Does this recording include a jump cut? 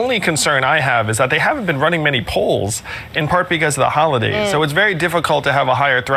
no; 0 cuts

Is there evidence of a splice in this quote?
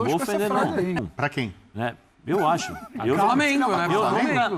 yes; 1 cut; at 1.0 s

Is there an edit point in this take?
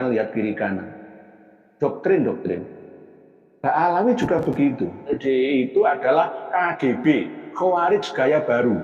yes; 1 cut; at 5.2 s

